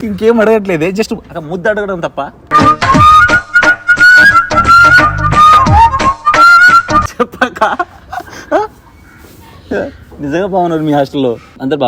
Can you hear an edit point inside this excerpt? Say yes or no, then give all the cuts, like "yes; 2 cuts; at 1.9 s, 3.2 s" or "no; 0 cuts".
no; 0 cuts